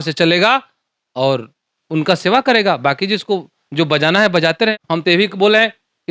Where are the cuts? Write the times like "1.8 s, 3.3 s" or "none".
none